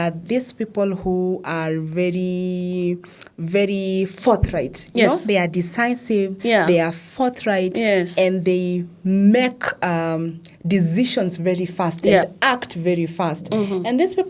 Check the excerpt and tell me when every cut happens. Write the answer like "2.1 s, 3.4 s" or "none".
none